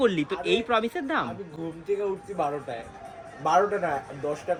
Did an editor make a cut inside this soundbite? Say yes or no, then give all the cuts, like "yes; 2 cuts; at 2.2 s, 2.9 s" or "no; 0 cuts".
no; 0 cuts